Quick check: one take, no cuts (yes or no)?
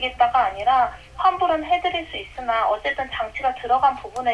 yes